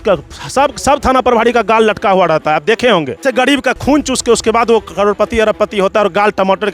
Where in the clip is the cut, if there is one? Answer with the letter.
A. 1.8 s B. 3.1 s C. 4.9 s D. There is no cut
B